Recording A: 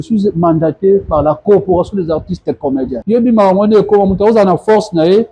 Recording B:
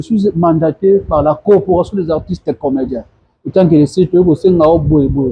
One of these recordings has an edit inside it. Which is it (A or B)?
A